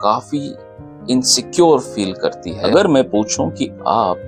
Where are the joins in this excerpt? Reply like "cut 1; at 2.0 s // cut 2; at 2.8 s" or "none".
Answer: cut 1; at 2.5 s